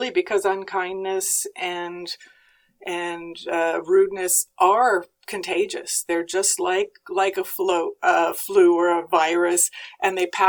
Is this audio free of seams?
yes; 0 cuts

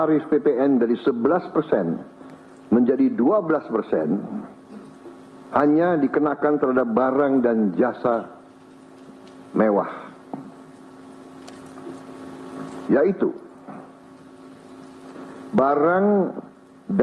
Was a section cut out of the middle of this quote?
no; 0 cuts

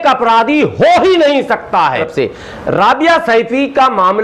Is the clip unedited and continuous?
no; 1 cut; at 2.0 s

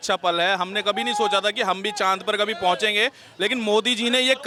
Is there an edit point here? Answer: no; 0 cuts

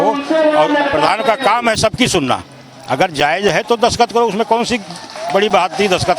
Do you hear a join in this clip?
no; 0 cuts

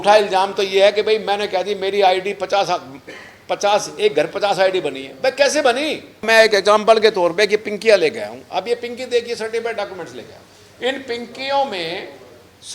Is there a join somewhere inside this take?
yes; 1 cut; at 6.2 s

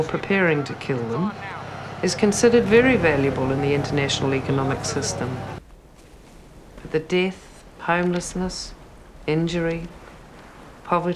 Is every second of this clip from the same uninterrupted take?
no; 1 cut; at 5.6 s

